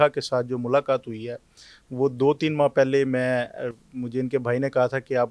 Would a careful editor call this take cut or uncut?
uncut